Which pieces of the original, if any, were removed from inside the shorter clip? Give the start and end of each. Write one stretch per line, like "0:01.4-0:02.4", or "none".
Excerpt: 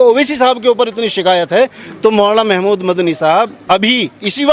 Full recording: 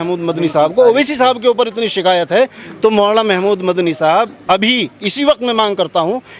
none